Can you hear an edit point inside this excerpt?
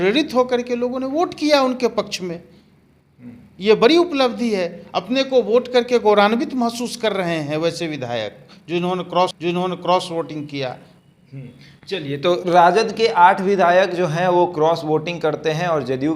no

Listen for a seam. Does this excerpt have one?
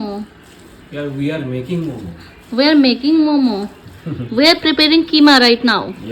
no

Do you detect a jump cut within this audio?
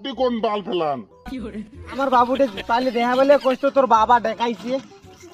yes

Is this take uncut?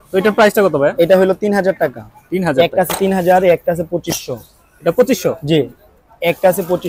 yes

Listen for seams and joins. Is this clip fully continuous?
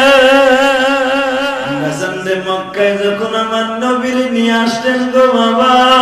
no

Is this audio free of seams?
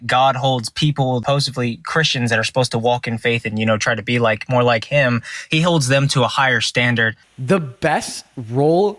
no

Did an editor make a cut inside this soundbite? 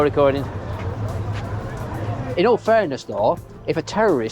yes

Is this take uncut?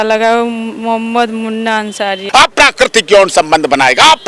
no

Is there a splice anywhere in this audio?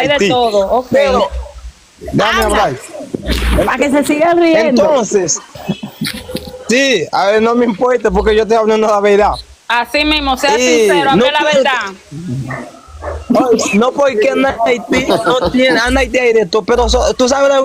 yes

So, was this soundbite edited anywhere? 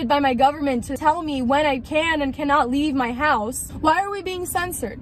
yes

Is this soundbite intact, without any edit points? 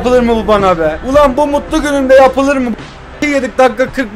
no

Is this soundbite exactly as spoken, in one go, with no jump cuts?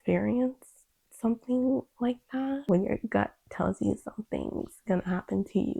no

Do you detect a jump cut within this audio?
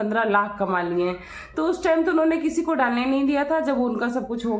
no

